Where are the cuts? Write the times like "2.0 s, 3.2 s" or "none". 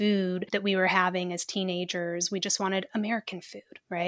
none